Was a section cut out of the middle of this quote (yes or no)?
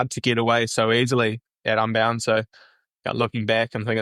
yes